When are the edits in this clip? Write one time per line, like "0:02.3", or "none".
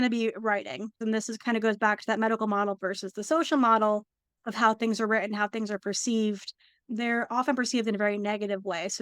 0:01.0